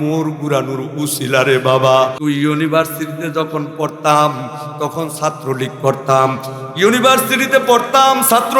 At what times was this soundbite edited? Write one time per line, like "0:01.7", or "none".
0:02.2